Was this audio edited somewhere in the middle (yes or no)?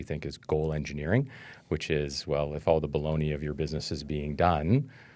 no